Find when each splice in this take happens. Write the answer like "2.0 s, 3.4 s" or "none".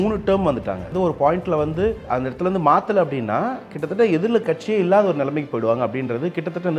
0.9 s, 2.0 s